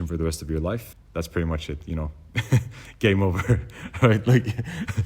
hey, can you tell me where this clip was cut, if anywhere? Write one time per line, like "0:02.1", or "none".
0:00.9